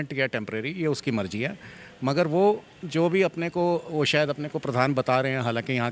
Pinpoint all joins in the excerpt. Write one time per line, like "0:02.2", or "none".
none